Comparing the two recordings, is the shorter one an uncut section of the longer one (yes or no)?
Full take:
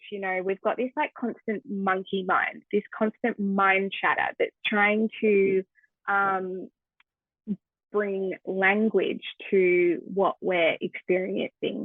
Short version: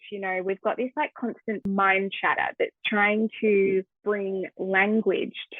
no